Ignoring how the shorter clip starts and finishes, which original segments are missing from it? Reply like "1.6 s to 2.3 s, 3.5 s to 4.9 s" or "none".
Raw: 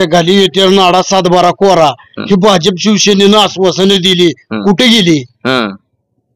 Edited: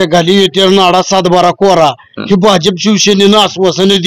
none